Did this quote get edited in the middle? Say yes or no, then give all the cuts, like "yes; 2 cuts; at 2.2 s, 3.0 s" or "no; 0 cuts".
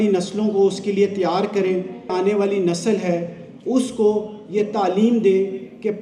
yes; 1 cut; at 2.1 s